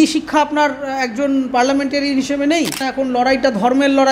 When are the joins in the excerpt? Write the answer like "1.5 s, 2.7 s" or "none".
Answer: 2.9 s